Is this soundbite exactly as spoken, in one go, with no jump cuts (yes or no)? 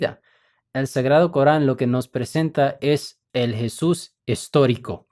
no